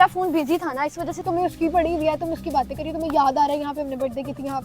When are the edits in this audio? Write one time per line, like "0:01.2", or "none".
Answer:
0:01.1